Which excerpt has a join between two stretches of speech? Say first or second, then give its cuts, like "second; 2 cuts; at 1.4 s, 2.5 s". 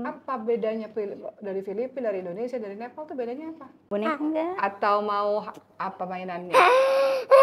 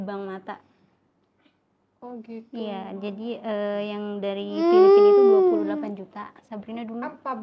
first; 1 cut; at 3.9 s